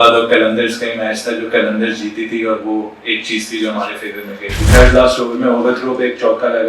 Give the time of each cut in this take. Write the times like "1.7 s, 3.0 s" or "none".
4.7 s